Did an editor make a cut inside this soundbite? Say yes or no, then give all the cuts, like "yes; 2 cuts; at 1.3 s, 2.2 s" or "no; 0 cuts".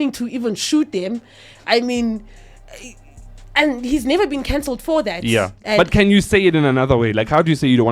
yes; 1 cut; at 5.6 s